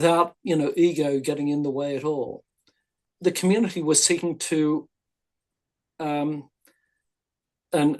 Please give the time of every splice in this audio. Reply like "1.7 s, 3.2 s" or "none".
3.1 s